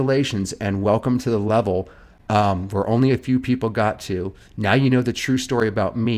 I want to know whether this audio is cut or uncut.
uncut